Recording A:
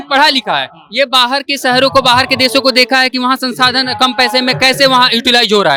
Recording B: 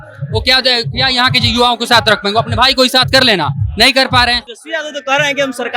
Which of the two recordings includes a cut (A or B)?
B